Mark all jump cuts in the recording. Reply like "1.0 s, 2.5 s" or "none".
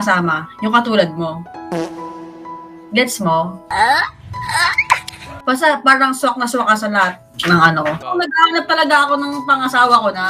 8.0 s